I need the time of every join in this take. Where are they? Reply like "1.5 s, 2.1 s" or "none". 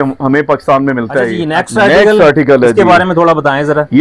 1.5 s